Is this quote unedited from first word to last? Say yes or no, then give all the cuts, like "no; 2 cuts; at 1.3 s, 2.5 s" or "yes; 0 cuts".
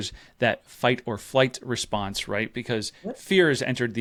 yes; 0 cuts